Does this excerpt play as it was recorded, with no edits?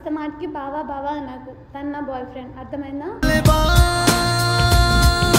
yes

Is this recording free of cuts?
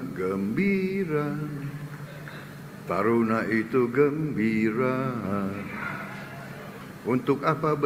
no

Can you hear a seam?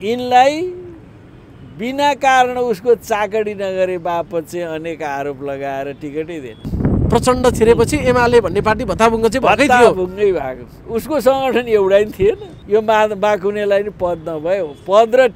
yes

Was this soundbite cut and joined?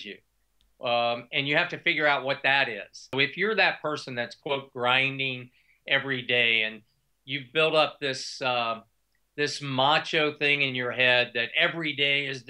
yes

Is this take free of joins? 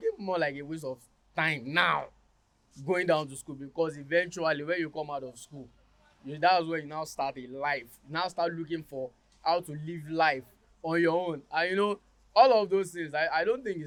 yes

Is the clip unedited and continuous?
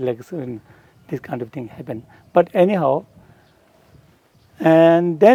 yes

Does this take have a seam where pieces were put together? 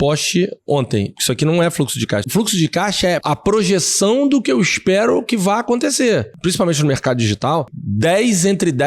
yes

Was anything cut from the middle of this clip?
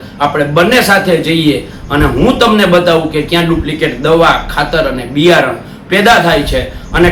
no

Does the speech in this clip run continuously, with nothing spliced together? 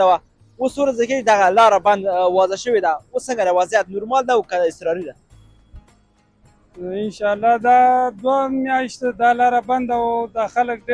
yes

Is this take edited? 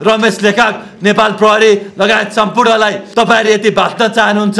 yes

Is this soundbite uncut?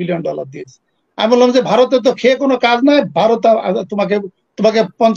yes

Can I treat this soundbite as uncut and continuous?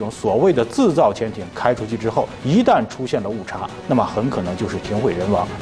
yes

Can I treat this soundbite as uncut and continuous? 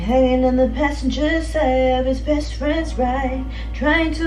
yes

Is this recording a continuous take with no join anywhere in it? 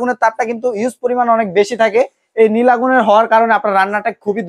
yes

